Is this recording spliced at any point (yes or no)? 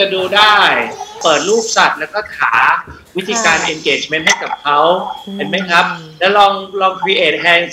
no